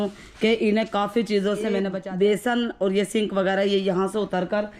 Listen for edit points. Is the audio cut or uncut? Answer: cut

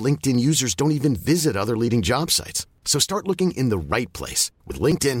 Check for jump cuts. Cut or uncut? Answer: uncut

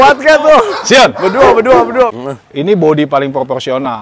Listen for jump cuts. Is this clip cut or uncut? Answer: cut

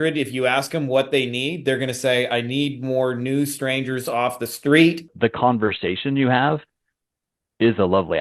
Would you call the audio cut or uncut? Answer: cut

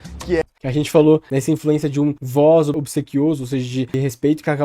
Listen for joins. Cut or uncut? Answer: cut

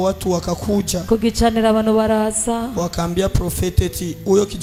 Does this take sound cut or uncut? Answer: uncut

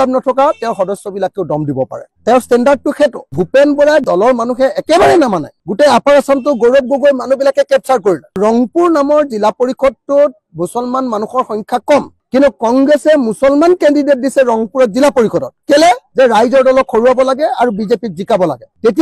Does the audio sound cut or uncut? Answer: cut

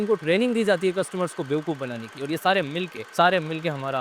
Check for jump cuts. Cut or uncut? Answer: cut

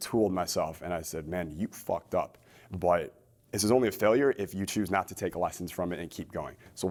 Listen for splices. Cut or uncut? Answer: uncut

